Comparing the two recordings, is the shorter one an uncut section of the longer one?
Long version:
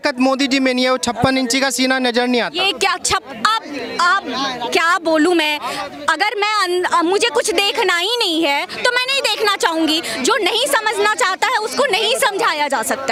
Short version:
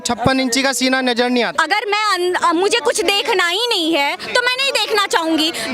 no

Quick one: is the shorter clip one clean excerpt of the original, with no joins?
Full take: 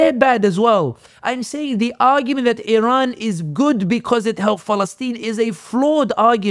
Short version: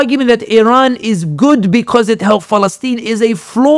yes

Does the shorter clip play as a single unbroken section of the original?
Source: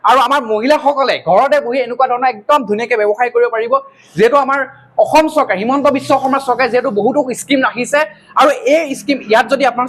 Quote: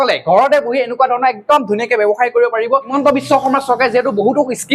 no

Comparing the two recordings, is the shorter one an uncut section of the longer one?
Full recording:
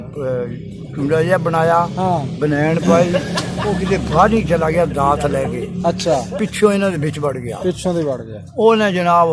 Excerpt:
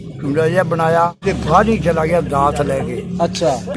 no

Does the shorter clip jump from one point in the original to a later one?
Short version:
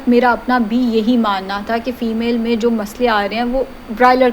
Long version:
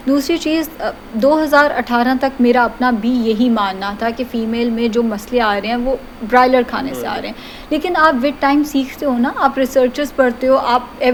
no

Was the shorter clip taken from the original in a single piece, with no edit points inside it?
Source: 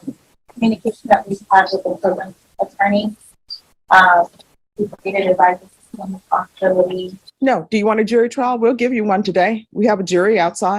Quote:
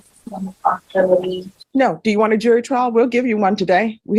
yes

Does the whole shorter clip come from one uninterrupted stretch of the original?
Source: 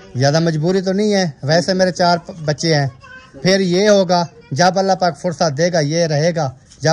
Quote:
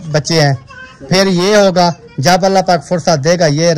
yes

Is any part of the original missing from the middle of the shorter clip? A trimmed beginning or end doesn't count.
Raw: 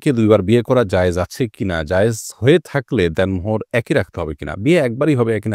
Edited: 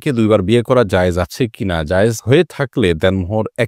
yes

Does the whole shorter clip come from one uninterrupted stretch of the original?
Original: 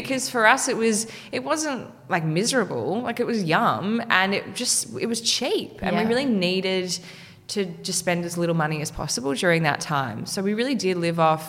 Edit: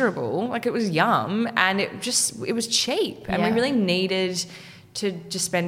yes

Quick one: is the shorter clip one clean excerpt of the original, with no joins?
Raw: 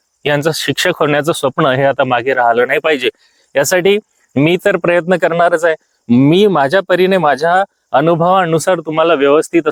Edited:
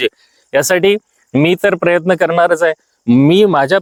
yes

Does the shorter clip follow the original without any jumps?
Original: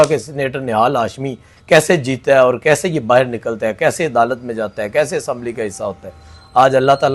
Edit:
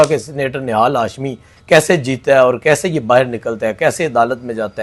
yes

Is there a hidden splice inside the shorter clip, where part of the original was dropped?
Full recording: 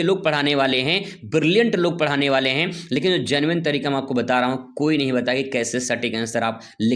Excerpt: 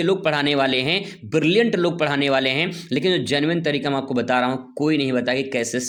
no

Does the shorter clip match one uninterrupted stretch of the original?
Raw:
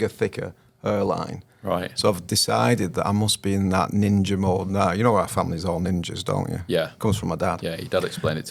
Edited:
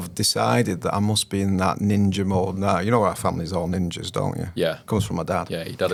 yes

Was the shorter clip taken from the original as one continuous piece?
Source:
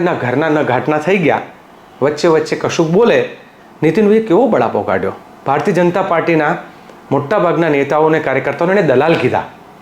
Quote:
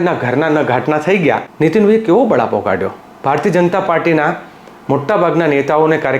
no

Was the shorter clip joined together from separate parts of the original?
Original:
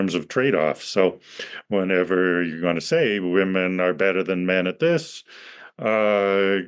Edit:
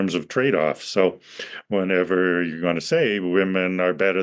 no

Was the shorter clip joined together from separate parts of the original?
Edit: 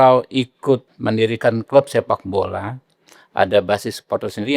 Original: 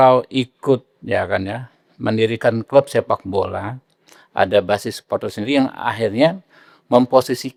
yes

